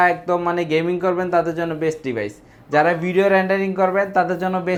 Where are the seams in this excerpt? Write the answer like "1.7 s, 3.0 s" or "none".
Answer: none